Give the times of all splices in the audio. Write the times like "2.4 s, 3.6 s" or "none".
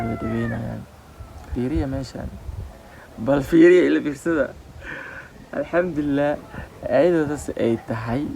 1.5 s